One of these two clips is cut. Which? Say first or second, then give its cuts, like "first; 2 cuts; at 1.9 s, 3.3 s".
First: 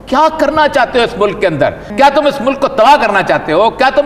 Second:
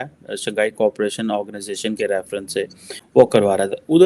second; 1 cut; at 3.0 s